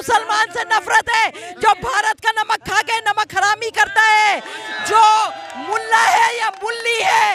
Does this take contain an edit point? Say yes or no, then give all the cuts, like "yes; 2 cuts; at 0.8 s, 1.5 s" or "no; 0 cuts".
no; 0 cuts